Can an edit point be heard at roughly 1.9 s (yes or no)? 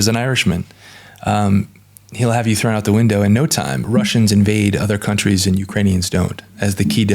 no